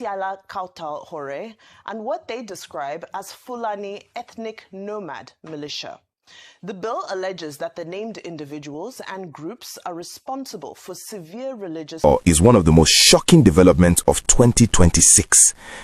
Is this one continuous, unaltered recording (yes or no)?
no